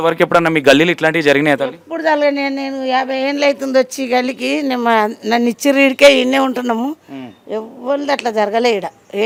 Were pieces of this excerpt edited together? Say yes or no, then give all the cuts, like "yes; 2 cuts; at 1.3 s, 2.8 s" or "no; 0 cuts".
no; 0 cuts